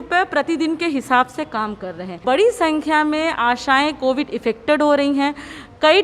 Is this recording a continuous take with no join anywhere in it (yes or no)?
no